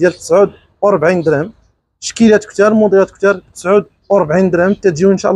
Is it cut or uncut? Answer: uncut